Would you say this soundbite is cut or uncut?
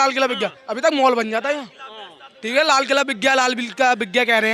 uncut